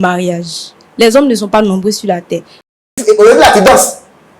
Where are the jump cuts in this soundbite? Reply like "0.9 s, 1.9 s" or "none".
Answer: 2.9 s